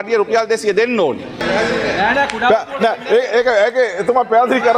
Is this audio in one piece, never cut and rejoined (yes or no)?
no